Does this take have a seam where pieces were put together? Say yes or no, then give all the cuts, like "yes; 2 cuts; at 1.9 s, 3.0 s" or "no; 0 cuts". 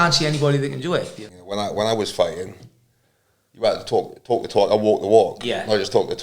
yes; 1 cut; at 1.2 s